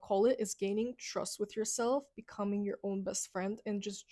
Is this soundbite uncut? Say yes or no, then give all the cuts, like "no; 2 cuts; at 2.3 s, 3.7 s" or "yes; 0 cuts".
yes; 0 cuts